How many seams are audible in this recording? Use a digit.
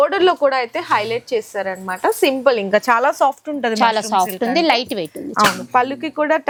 0